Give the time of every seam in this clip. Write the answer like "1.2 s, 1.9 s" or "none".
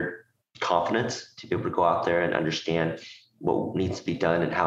none